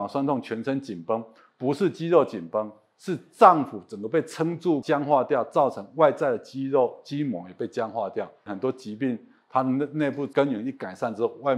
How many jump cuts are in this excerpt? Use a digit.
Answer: 3